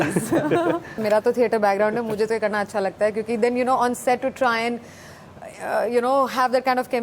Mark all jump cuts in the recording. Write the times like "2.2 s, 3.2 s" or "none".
1.0 s